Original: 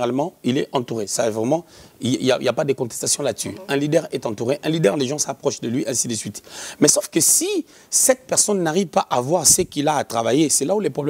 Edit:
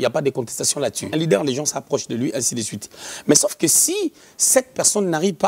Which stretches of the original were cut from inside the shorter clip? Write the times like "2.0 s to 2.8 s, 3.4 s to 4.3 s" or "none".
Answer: 3.5 s to 4.6 s